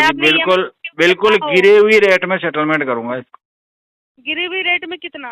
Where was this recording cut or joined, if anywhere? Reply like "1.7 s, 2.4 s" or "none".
none